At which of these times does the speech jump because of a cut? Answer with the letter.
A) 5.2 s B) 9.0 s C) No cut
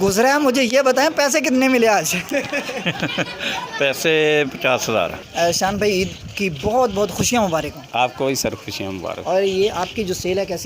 A